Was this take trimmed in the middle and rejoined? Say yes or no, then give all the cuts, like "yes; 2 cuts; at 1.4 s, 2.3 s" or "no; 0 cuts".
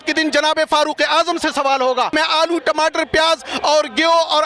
yes; 1 cut; at 2.1 s